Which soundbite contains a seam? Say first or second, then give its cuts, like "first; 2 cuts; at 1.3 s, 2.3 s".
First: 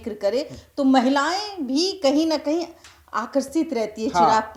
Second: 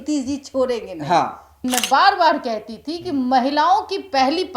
second; 1 cut; at 1.6 s